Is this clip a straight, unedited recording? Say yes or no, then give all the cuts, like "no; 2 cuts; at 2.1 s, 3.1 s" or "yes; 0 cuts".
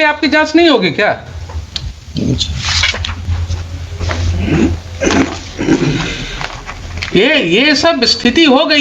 yes; 0 cuts